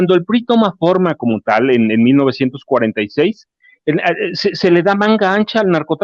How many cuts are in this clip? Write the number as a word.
zero